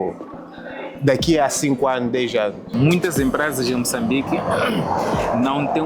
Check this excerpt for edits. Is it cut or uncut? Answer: cut